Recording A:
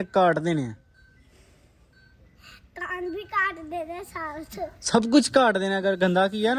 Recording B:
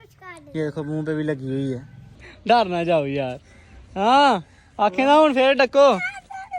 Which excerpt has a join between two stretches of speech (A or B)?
B